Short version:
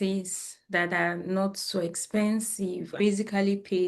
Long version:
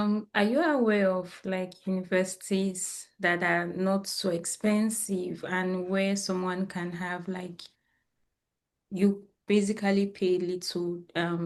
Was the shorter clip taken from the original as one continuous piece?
no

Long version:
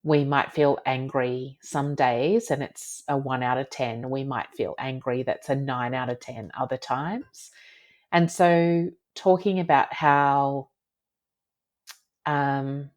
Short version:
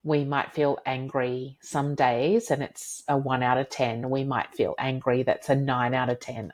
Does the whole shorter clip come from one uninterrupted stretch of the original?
yes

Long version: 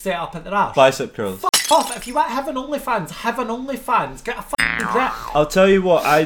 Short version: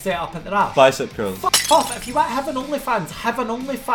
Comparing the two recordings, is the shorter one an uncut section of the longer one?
yes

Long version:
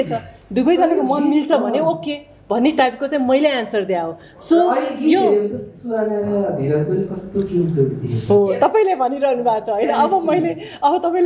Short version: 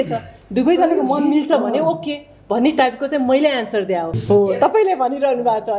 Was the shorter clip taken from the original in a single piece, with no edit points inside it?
no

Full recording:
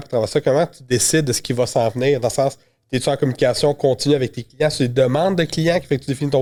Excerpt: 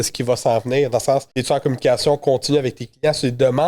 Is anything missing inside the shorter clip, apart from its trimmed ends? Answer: yes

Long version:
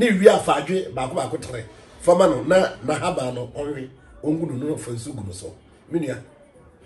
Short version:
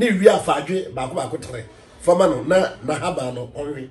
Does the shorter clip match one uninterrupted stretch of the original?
yes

